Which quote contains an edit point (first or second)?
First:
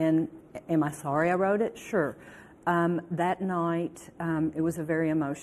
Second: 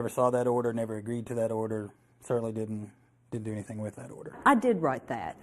second